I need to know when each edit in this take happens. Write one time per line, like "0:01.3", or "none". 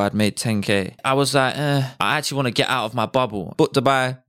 0:00.9
0:01.9
0:03.5